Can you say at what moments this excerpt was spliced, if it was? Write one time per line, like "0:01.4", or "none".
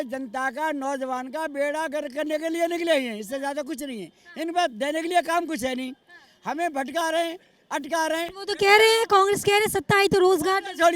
none